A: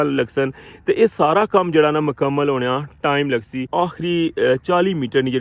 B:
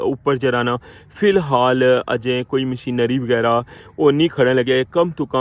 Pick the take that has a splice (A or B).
A